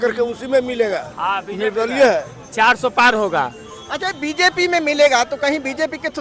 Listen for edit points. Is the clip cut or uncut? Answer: uncut